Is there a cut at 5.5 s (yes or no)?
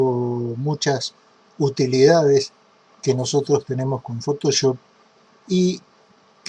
no